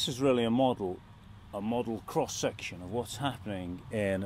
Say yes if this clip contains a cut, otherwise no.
no